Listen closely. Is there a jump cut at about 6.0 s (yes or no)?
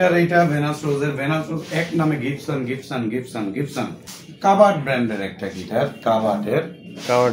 no